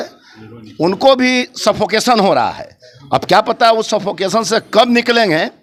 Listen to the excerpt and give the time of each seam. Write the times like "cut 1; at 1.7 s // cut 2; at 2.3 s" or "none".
none

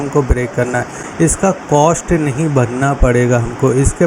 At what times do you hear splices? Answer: cut 1; at 1.0 s

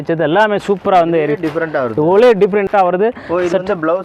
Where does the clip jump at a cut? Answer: cut 1; at 2.7 s

